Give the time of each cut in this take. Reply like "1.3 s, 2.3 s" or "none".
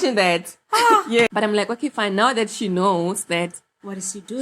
1.1 s